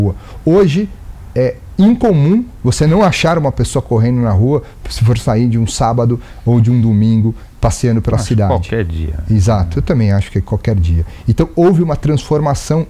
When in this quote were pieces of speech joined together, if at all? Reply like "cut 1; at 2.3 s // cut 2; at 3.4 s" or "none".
none